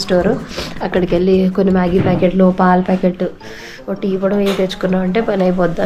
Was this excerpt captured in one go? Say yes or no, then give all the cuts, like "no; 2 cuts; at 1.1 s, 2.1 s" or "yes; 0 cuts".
yes; 0 cuts